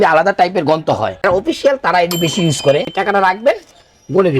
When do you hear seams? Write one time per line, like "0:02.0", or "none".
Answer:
0:01.2
0:02.9